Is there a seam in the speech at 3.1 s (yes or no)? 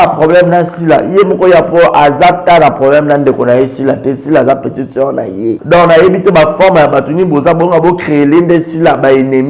no